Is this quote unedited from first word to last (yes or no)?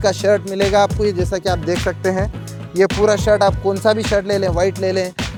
yes